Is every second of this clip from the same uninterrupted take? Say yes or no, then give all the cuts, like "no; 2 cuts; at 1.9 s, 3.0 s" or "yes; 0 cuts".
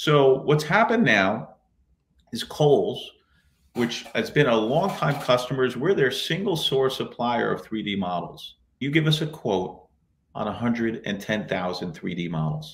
no; 1 cut; at 8.8 s